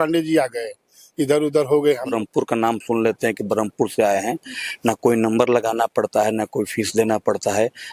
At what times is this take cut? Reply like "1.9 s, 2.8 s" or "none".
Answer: 2.1 s

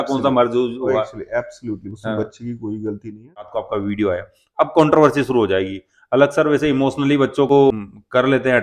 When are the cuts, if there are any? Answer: 3.5 s, 7.7 s

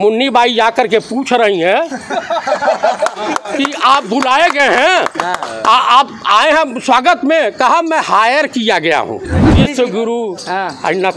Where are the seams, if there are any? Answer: 9.5 s

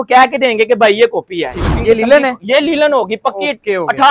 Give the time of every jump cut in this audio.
1.6 s

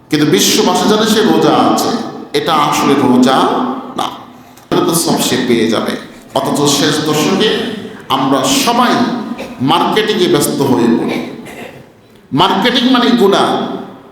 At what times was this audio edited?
4.7 s

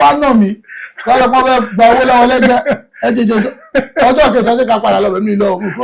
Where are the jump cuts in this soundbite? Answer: none

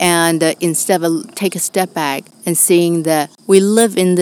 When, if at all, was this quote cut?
2.3 s, 3.3 s

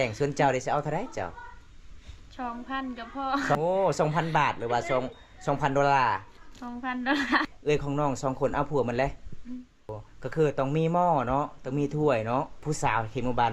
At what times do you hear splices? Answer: 3.5 s, 7.5 s, 9.9 s, 12.5 s

